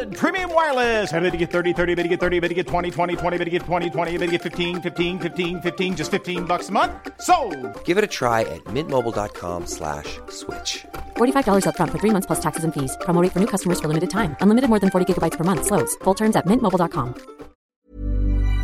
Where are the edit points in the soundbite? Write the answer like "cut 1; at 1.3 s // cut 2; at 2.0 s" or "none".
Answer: cut 1; at 17.6 s